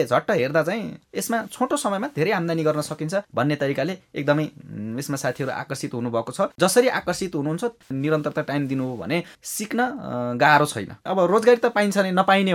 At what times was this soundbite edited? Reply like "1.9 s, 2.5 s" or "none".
6.5 s, 11.0 s